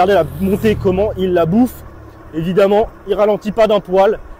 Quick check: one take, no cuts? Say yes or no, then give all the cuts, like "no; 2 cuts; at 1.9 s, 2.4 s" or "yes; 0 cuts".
yes; 0 cuts